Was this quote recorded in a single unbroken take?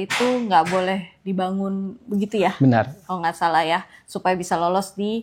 yes; 0 cuts

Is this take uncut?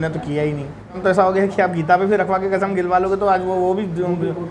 no; 1 cut; at 1.0 s

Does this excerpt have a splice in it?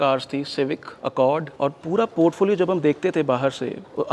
no; 0 cuts

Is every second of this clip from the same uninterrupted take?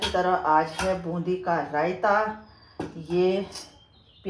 yes; 0 cuts

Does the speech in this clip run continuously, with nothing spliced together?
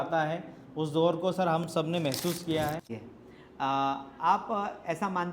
no; 1 cut; at 2.9 s

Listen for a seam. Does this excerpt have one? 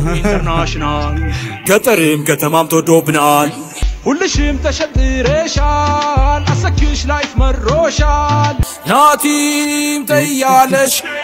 no; 0 cuts

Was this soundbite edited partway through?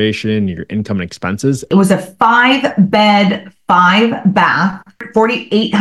yes; 2 cuts; at 1.7 s, 5.0 s

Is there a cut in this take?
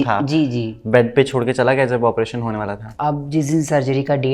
yes; 1 cut; at 2.9 s

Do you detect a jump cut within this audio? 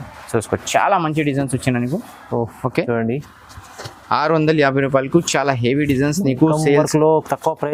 no; 0 cuts

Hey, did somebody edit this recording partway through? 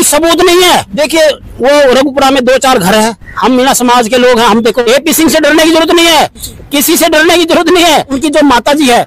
yes; 3 cuts; at 0.9 s, 4.8 s, 8.1 s

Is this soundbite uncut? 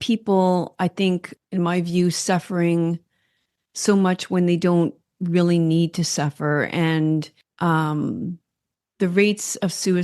no; 2 cuts; at 1.4 s, 7.4 s

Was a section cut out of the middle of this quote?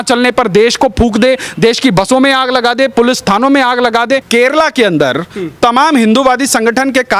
yes; 1 cut; at 4.2 s

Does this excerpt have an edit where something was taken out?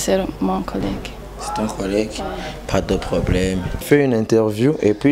no; 0 cuts

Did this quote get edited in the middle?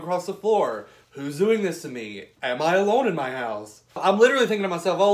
yes; 1 cut; at 4.0 s

